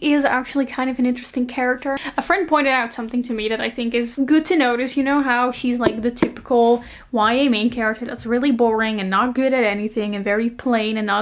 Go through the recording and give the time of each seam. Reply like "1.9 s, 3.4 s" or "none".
none